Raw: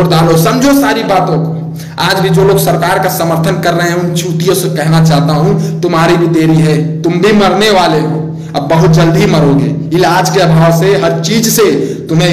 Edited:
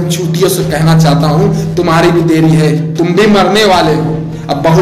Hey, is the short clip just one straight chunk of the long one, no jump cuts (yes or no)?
yes